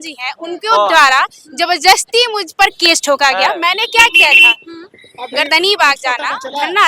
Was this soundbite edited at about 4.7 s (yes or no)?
no